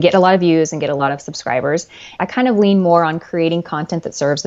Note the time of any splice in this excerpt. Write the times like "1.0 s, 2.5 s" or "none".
2.1 s